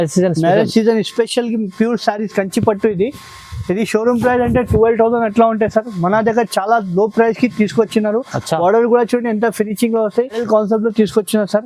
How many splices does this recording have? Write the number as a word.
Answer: one